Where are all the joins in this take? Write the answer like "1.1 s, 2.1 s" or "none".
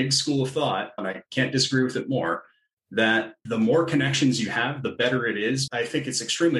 1.0 s, 3.4 s, 5.7 s